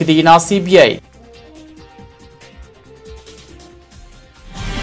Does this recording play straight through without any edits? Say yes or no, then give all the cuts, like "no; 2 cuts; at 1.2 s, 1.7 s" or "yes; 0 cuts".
no; 1 cut; at 1.3 s